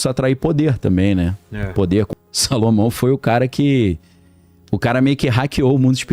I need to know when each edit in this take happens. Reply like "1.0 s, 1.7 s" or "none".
2.1 s

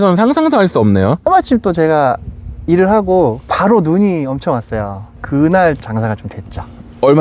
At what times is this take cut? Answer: 1.2 s, 5.8 s

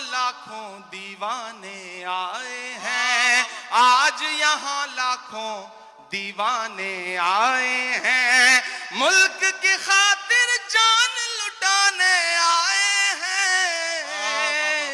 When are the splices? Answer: none

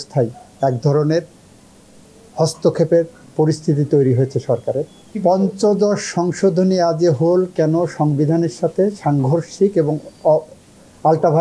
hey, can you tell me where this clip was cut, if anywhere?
5.0 s

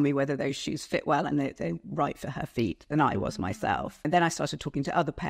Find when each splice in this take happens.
4.1 s

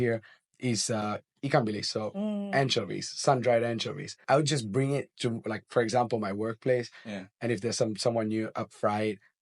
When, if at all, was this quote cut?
4.2 s

